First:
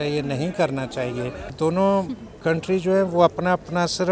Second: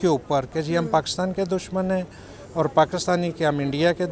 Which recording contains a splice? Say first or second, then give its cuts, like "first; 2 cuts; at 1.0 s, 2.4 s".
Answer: first; 1 cut; at 1.5 s